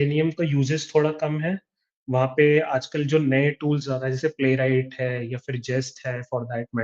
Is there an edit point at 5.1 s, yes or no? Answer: no